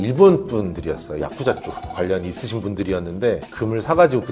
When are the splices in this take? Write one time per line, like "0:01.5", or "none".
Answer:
0:01.2
0:03.4

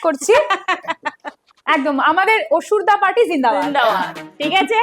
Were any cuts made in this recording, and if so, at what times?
none

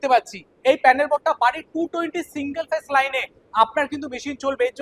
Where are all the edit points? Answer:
none

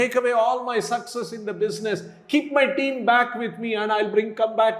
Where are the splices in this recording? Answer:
none

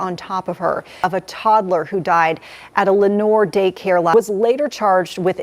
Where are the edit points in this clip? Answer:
0:01.0
0:04.1

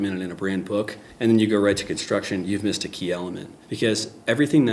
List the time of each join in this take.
0:01.0

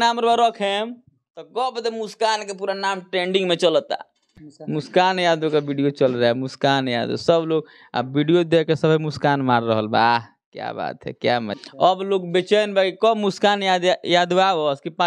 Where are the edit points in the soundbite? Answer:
0:04.4
0:11.5

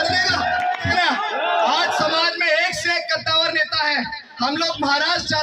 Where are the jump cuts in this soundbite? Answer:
0:00.9

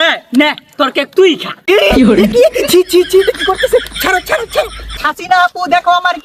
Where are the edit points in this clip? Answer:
0:04.9

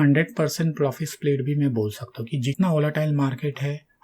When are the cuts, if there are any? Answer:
0:02.5

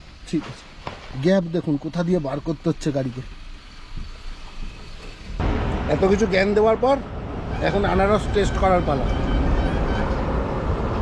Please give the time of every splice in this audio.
0:05.4

